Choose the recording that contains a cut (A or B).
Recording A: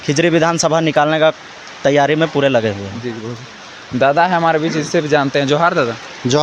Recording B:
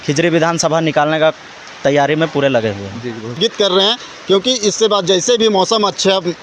B